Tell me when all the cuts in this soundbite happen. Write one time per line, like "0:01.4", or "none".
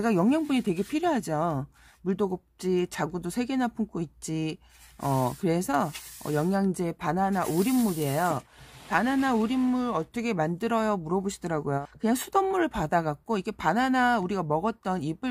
none